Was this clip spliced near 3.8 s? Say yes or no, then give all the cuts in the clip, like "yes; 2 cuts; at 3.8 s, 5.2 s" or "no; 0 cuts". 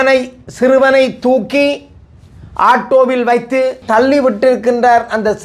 yes; 1 cut; at 3.8 s